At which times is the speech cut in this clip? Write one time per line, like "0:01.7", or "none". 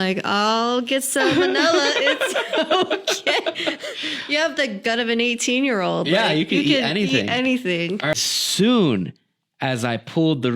0:08.2